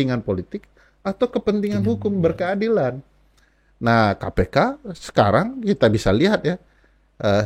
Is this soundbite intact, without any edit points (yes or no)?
yes